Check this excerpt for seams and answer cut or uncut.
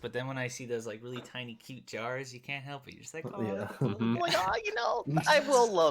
uncut